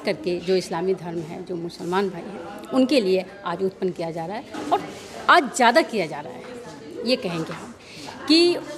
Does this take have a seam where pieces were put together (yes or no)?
no